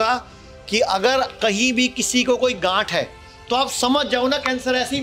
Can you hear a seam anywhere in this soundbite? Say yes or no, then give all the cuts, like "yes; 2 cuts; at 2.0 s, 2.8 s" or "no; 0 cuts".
no; 0 cuts